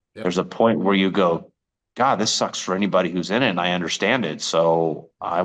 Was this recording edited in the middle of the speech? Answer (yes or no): no